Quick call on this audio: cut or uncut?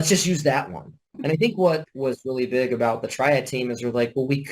cut